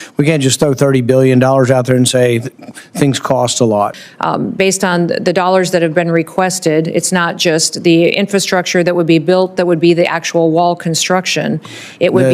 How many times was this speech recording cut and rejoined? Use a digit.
1